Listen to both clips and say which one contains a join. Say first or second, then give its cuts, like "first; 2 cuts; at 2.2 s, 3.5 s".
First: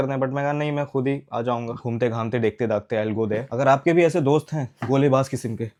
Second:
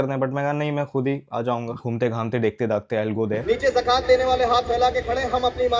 second; 1 cut; at 3.4 s